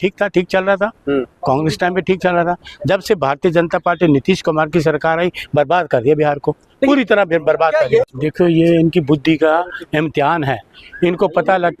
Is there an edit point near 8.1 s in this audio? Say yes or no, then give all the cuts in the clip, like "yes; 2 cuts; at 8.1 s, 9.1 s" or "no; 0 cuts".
yes; 1 cut; at 8.1 s